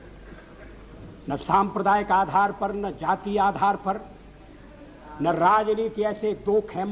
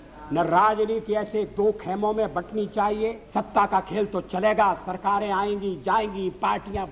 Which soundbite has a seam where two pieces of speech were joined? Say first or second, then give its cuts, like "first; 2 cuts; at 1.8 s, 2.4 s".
second; 1 cut; at 3.2 s